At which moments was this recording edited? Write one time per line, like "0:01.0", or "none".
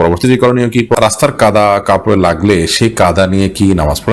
0:00.9